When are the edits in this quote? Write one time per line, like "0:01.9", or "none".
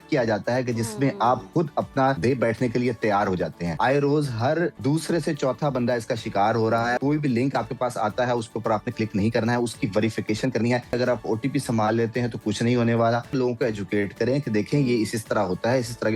0:02.2
0:03.7
0:04.8
0:07.0
0:11.0
0:13.3